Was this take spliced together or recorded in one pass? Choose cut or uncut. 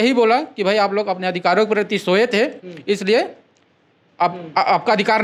uncut